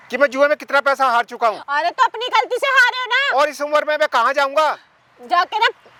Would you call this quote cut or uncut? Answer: uncut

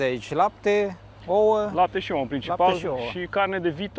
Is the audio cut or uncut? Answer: uncut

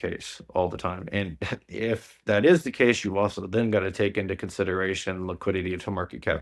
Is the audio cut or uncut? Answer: uncut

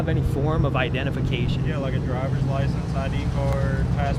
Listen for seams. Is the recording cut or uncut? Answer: uncut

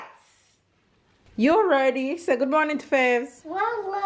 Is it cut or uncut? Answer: cut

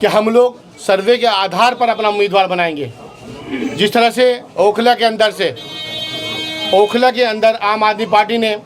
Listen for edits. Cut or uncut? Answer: uncut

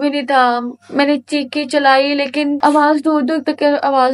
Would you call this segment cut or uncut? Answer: cut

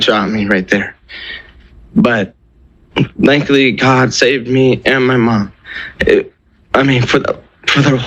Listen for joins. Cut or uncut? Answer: uncut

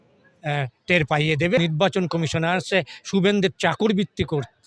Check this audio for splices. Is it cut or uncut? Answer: cut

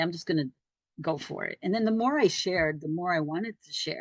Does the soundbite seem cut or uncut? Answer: uncut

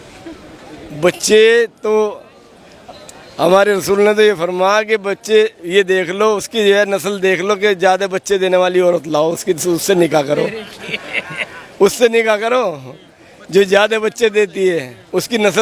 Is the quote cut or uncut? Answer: uncut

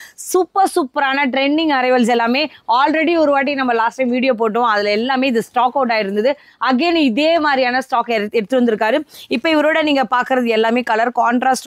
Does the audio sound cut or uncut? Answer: uncut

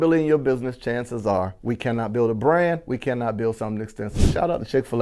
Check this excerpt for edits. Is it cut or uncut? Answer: uncut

